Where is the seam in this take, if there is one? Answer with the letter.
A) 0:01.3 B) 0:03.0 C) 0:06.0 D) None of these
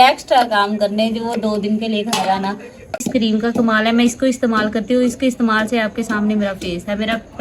B